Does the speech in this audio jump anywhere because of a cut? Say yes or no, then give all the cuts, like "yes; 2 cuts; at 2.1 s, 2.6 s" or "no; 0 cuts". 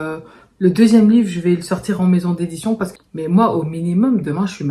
yes; 1 cut; at 3.0 s